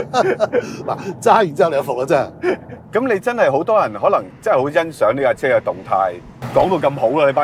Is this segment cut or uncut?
cut